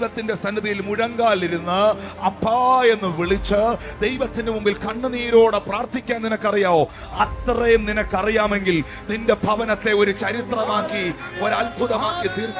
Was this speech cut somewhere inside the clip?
no; 0 cuts

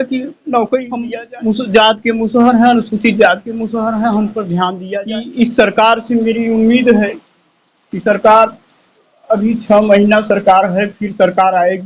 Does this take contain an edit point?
yes; 2 cuts; at 1.0 s, 4.8 s

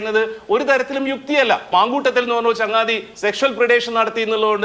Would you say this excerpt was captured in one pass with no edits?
no; 1 cut; at 1.7 s

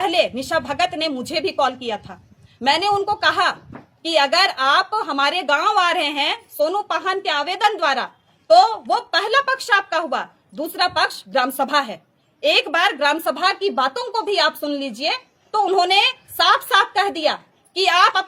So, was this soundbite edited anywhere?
no; 0 cuts

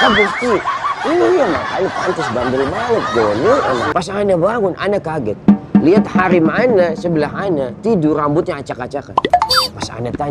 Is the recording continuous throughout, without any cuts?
no; 1 cut; at 3.9 s

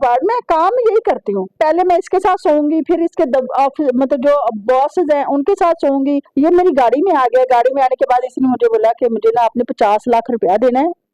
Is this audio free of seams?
no; 2 cuts; at 1.6 s, 6.3 s

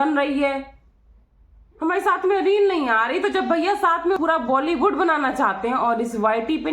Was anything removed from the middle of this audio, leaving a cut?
yes; 1 cut; at 4.2 s

